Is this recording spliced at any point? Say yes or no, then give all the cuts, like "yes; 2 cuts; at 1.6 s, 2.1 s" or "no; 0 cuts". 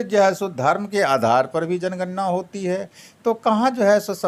no; 0 cuts